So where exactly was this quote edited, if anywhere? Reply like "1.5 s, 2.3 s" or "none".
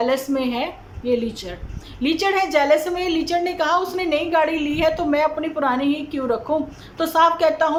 none